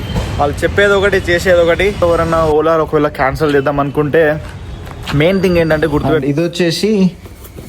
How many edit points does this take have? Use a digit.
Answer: 2